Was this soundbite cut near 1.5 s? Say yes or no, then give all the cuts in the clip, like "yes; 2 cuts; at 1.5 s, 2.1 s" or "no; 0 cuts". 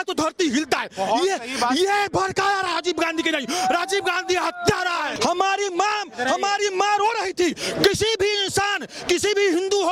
no; 1 cut; at 5.1 s